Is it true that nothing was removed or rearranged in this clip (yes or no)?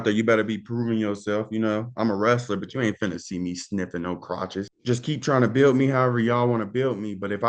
no